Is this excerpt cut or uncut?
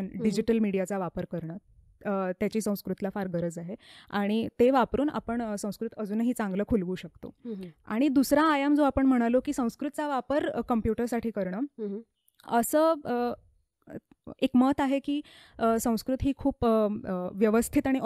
uncut